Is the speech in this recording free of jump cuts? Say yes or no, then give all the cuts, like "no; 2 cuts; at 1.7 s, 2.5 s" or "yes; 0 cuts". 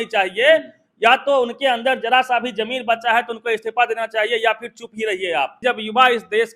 no; 1 cut; at 5.6 s